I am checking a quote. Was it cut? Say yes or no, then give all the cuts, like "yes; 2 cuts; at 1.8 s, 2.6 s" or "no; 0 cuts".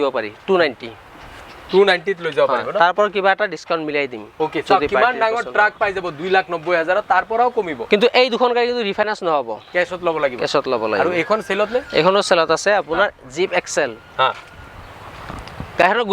no; 0 cuts